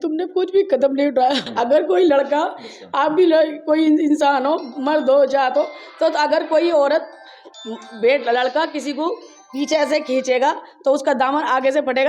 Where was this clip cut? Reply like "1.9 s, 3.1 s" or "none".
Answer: 1.4 s